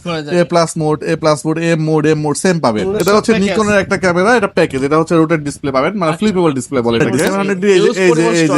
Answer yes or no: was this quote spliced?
yes